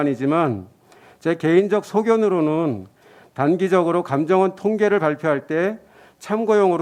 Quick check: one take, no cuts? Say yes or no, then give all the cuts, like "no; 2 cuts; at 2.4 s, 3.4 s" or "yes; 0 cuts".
yes; 0 cuts